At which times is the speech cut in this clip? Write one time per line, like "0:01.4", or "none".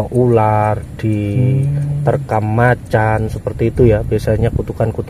none

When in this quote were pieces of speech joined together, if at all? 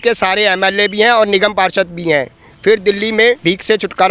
none

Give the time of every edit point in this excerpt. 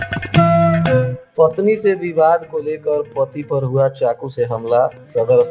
0:01.2

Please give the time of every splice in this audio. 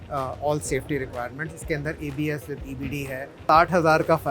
0:03.3

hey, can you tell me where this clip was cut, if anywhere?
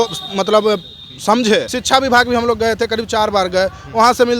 0:01.8

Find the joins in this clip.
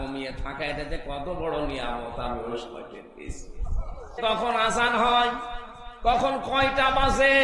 0:04.2

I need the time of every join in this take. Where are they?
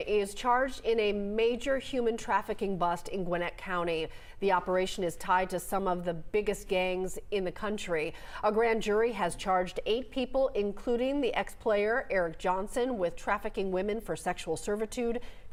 none

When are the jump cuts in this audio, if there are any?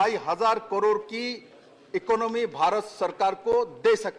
none

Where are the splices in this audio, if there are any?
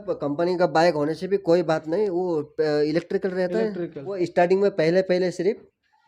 0:04.1

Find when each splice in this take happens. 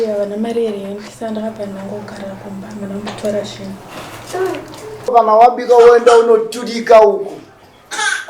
0:05.1

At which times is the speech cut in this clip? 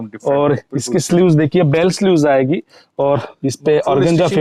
none

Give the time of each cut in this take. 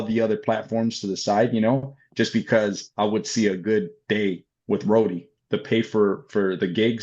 0:05.3

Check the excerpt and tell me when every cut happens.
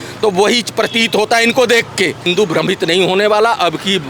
0:02.3

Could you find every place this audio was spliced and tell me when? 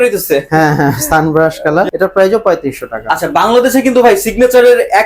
0:01.9
0:03.0

